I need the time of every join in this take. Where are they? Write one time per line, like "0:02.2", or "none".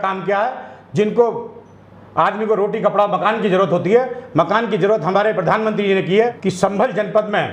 0:06.4